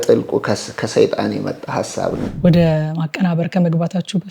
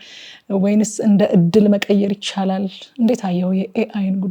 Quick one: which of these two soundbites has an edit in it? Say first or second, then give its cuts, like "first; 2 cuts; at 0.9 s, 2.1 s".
first; 1 cut; at 2.2 s